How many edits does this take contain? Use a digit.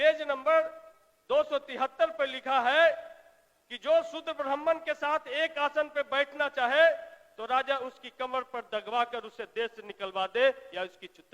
0